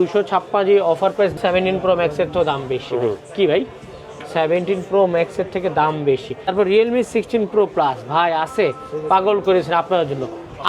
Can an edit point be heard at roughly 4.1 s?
no; 2 cuts; at 1.4 s, 6.5 s

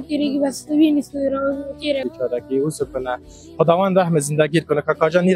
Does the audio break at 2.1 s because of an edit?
yes; 1 cut; at 2.1 s

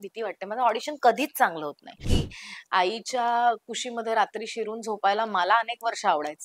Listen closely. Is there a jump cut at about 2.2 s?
yes; 1 cut; at 2.2 s

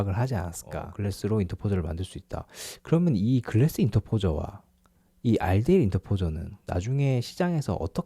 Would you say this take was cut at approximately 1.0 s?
yes; 1 cut; at 1.0 s

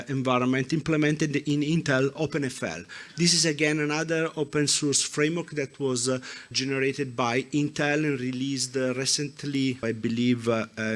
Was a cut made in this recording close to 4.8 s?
no; 3 cuts; at 2.1 s, 6.5 s, 9.8 s

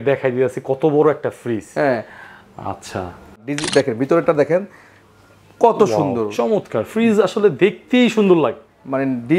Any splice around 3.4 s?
yes; 1 cut; at 3.4 s

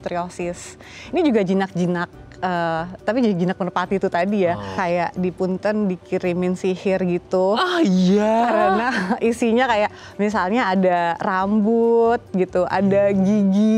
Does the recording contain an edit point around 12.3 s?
no; 1 cut; at 4.7 s

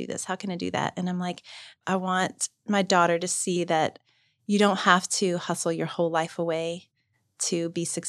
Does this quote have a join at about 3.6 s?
yes; 2 cuts; at 1.7 s, 3.6 s

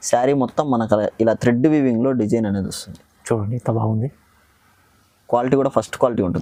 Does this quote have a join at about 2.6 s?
no; 0 cuts

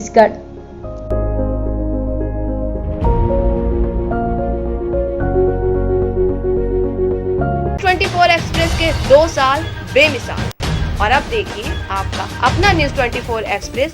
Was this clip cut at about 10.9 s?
no; 1 cut; at 7.8 s

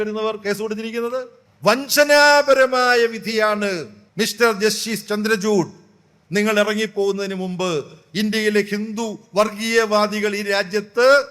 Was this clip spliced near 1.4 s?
yes; 2 cuts; at 1.4 s, 4.0 s

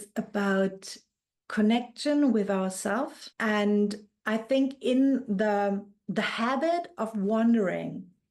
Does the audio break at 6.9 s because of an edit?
no; 1 cut; at 3.2 s

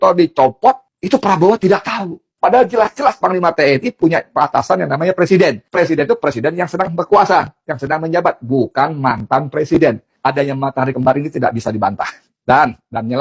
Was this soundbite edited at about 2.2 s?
yes; 4 cuts; at 0.9 s, 2.2 s, 5.6 s, 10.1 s

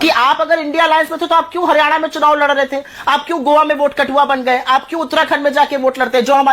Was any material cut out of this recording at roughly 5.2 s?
no; 0 cuts

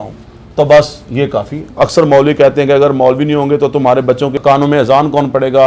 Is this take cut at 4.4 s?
yes; 2 cuts; at 1.7 s, 4.4 s

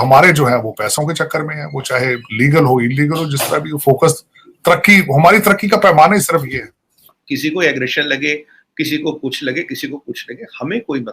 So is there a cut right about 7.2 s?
yes; 1 cut; at 7.2 s

